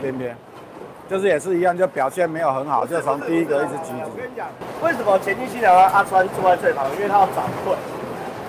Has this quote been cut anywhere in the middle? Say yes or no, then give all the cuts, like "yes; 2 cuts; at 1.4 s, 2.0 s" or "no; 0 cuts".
no; 0 cuts